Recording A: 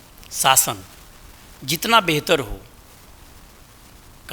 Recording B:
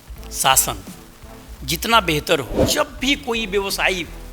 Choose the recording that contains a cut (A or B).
B